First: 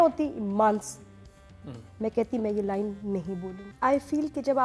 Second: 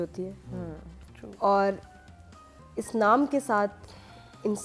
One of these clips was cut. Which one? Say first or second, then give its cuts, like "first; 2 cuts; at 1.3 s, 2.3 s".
first; 1 cut; at 3.6 s